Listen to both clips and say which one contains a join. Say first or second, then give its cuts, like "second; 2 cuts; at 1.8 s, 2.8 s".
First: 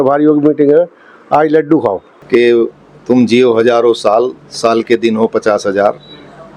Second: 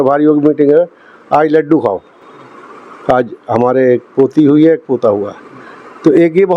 first; 1 cut; at 2.1 s